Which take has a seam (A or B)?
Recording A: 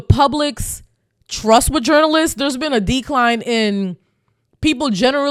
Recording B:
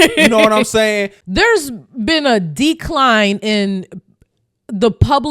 B